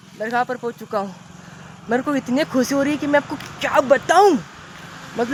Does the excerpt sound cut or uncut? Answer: uncut